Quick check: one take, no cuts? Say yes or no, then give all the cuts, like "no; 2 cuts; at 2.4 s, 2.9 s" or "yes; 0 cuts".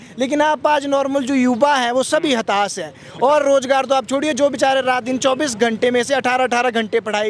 yes; 0 cuts